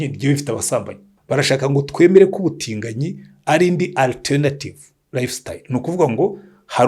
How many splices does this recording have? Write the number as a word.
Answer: one